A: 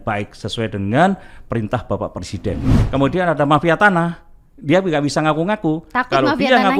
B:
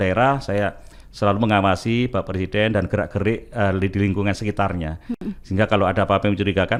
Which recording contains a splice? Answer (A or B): A